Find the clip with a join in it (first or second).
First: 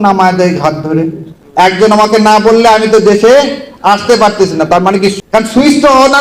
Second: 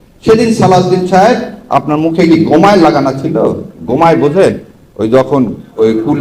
first